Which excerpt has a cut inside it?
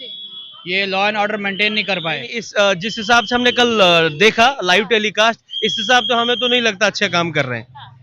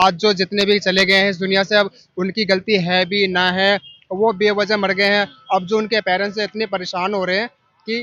first; 1 cut; at 2.4 s

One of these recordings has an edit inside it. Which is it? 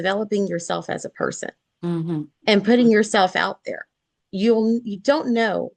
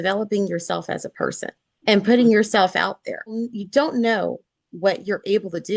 second; 2 cuts; at 1.7 s, 3.5 s

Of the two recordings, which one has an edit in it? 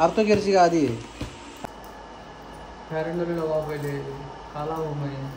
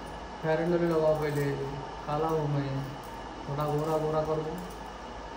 first; 1 cut; at 1.5 s

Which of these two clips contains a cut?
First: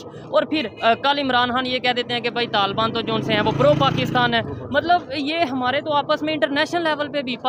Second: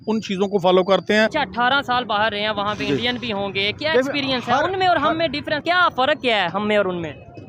second; 2 cuts; at 1.3 s, 5.6 s

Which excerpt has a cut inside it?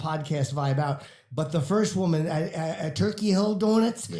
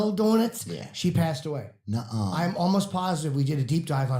second; 1 cut; at 1.7 s

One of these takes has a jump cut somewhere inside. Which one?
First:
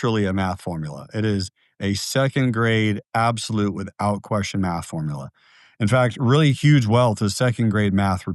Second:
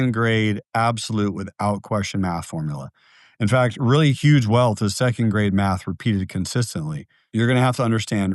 second; 1 cut; at 7.2 s

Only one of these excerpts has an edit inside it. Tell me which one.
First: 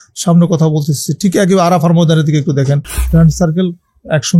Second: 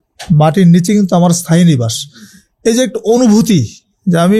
first; 1 cut; at 3.0 s

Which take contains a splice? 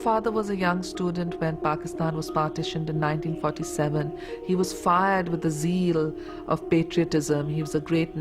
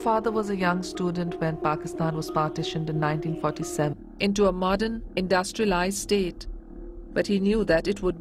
first; 1 cut; at 3.9 s

